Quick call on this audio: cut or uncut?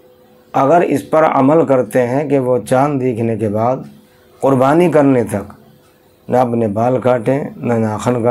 uncut